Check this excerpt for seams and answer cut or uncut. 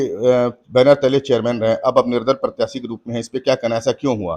uncut